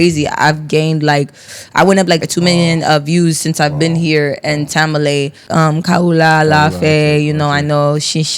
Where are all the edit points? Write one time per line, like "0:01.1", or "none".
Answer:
0:05.5